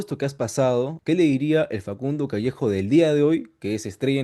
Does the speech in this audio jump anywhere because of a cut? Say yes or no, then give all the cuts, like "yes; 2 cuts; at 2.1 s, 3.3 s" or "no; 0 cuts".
yes; 1 cut; at 1.0 s